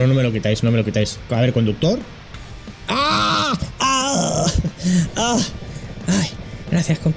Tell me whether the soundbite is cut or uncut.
uncut